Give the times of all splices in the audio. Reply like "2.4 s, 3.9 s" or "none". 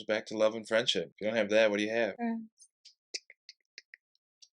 1.1 s, 2.2 s

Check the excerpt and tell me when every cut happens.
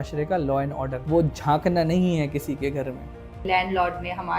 1.0 s, 3.4 s

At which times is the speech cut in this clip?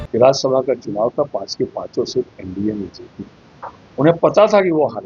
none

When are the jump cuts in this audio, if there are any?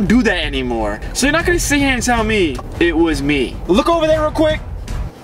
1.0 s, 2.6 s, 3.6 s

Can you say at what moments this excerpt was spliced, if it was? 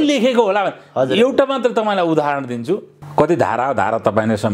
3.0 s

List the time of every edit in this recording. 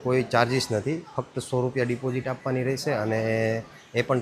none

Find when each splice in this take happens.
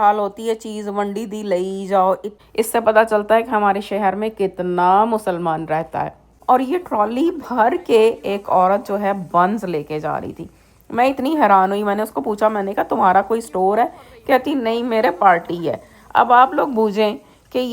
2.3 s, 6.3 s

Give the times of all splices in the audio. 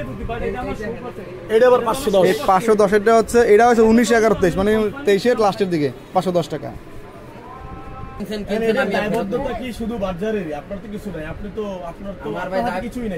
8.2 s

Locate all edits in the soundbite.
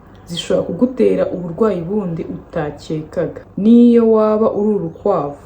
3.4 s

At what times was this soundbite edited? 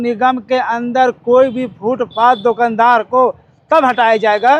none

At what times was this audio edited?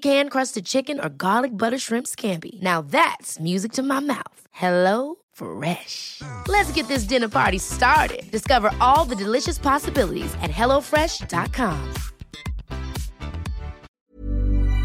13.9 s

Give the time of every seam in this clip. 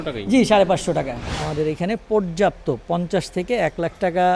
1.3 s

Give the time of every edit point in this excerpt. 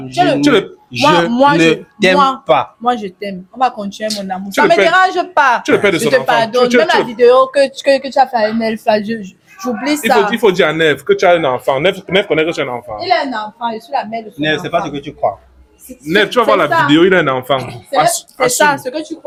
none

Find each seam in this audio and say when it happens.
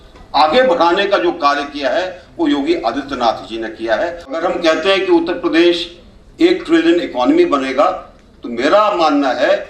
4.4 s

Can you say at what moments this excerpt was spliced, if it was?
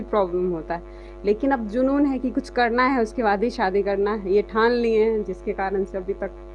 none

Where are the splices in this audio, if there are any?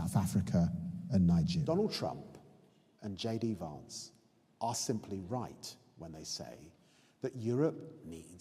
1.7 s

